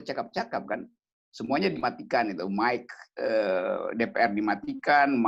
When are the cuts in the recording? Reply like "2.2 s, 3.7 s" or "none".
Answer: none

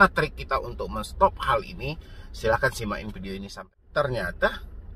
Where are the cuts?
3.7 s

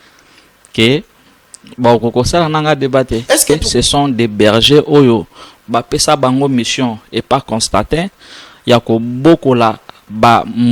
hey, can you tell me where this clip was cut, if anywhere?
3.5 s

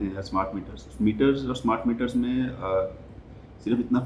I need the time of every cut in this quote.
none

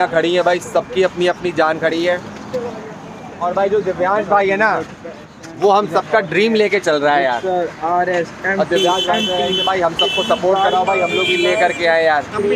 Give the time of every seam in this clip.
none

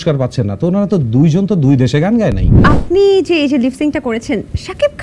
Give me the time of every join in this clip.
2.6 s

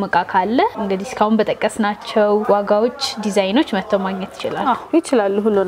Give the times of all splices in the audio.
none

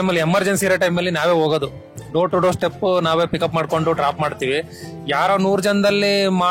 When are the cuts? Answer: none

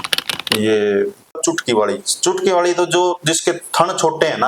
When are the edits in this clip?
1.4 s

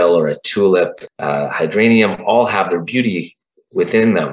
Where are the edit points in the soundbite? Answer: 1.0 s

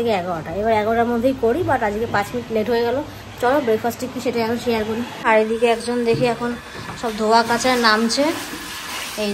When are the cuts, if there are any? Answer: 5.3 s

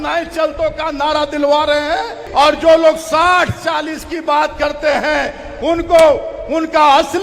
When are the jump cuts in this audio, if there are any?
2.2 s

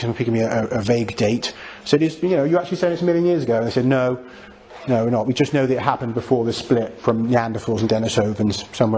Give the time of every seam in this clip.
none

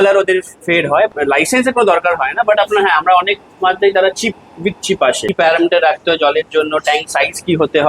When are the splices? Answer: 1.1 s, 5.2 s

